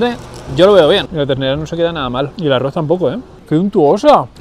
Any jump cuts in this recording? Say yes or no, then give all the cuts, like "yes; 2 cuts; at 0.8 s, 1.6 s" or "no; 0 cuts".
yes; 2 cuts; at 1.1 s, 3.3 s